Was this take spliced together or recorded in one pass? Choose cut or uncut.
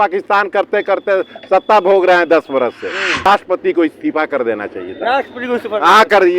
cut